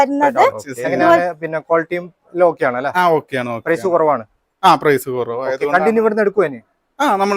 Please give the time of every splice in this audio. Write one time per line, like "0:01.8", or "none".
0:01.2